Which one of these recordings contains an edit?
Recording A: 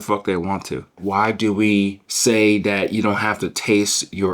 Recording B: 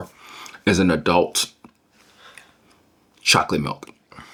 A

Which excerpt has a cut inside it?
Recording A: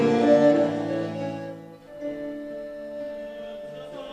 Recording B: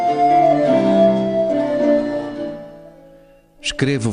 A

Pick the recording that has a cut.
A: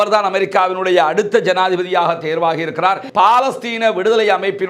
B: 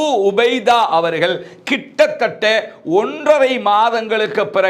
A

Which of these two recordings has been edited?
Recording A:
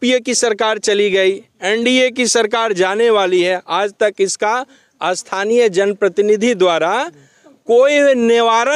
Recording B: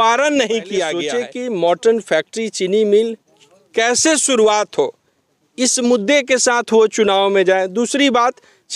B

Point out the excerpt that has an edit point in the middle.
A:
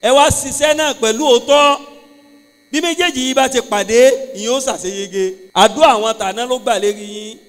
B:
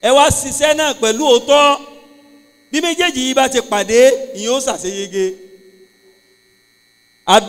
A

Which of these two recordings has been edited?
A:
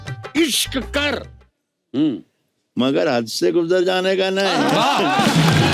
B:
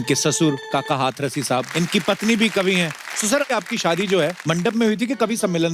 B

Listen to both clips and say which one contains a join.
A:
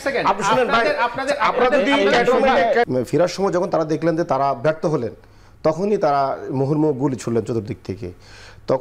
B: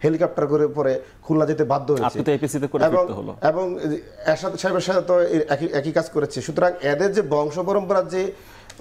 A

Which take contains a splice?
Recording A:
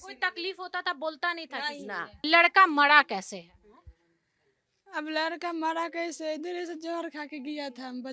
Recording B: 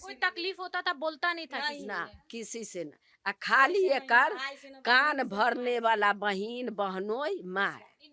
A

